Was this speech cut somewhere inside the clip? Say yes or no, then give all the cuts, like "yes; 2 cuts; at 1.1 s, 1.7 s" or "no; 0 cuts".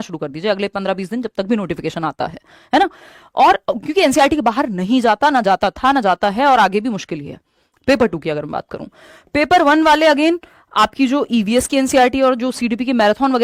no; 0 cuts